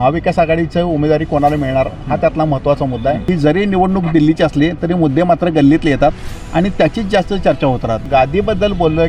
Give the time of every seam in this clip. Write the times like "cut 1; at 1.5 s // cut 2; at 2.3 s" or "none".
cut 1; at 3.2 s // cut 2; at 8.0 s

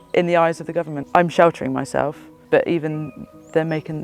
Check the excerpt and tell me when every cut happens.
cut 1; at 1.0 s // cut 2; at 2.3 s

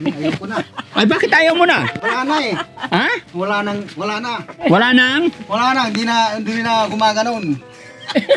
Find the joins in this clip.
none

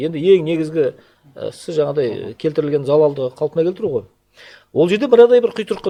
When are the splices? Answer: none

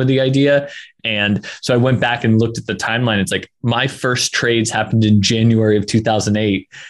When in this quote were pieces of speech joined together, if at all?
cut 1; at 1.0 s

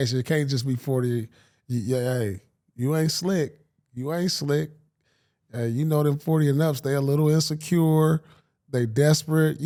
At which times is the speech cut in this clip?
none

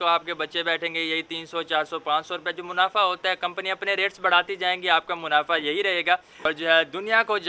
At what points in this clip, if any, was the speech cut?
cut 1; at 6.3 s

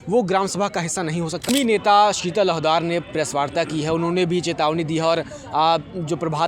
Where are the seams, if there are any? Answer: cut 1; at 1.5 s

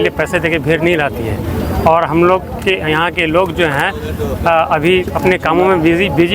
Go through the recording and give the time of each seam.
none

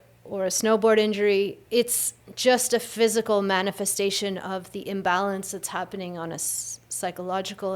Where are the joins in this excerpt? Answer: cut 1; at 1.6 s

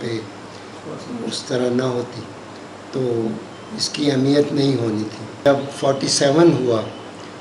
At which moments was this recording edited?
cut 1; at 5.4 s

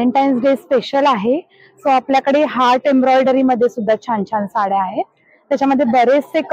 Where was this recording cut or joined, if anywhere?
none

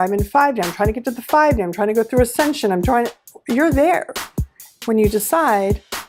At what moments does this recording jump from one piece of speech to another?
none

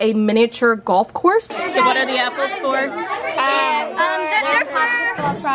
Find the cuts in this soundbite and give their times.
cut 1; at 1.5 s

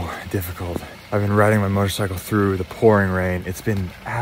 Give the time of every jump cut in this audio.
cut 1; at 1.0 s // cut 2; at 3.4 s

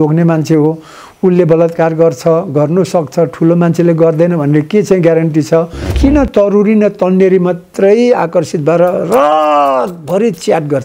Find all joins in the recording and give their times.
cut 1; at 5.9 s

